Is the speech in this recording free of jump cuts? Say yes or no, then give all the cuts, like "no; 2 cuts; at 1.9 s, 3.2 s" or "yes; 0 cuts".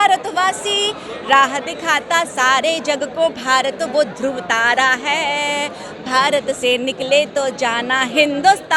yes; 0 cuts